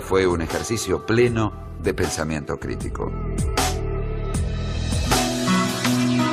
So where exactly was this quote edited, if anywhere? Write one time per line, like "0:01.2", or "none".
0:05.2